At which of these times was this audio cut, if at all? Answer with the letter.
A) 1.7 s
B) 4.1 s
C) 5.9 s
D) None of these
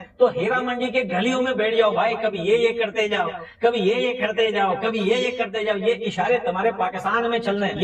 D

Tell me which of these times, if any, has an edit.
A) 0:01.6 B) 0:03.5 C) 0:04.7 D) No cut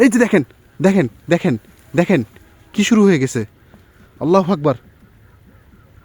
D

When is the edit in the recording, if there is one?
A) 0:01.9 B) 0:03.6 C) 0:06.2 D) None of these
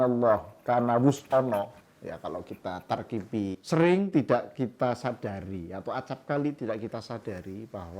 B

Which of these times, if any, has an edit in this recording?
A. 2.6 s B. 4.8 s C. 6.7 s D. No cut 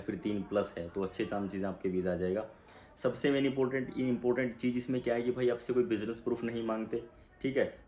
D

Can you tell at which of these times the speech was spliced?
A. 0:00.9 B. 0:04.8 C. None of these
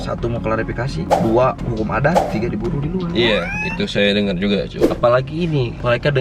B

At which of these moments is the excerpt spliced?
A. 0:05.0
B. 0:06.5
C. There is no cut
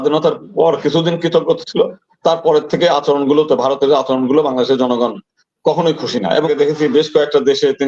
B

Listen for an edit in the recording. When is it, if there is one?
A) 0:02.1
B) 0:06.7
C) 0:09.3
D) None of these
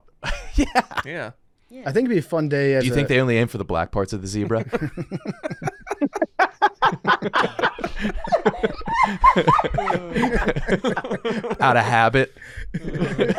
D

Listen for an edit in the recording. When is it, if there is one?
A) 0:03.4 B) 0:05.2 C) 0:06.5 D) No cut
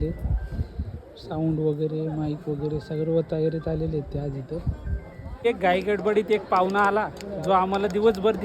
B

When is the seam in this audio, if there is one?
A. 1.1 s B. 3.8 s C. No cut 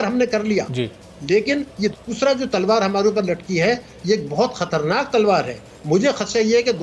C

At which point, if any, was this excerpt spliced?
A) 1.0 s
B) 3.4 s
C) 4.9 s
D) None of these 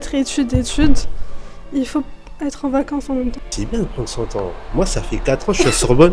B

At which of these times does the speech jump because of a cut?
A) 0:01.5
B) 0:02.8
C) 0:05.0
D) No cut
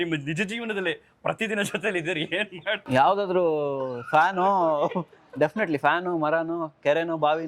B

